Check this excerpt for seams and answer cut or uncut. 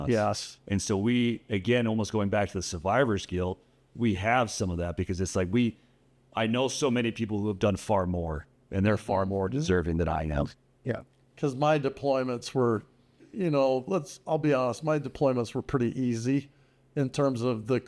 uncut